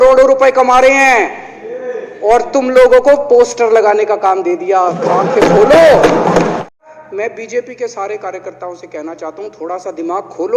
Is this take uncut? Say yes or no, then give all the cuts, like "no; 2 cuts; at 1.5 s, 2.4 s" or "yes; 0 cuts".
no; 1 cut; at 6.7 s